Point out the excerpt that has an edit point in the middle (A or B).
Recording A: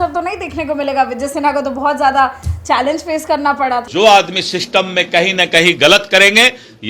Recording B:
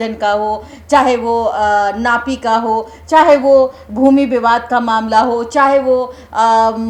A